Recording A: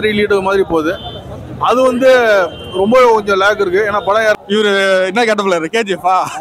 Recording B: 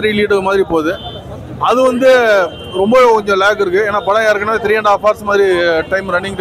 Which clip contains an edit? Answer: A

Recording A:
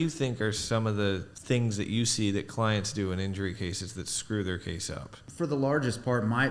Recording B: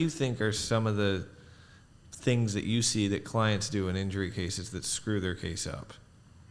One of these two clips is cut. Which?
A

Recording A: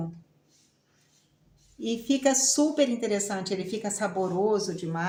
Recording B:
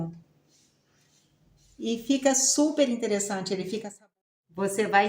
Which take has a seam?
B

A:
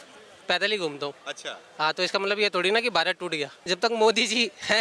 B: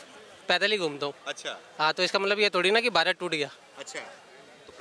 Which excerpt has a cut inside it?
A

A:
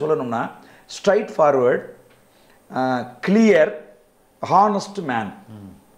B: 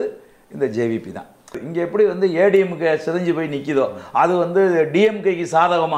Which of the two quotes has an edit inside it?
B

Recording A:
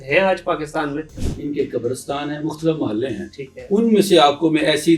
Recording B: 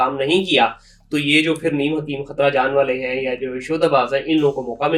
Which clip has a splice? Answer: A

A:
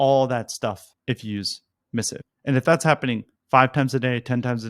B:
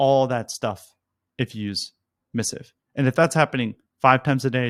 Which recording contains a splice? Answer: A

